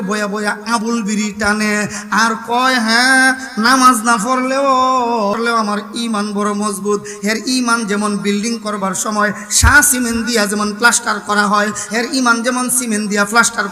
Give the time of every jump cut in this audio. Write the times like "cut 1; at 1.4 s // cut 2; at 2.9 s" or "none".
cut 1; at 5.3 s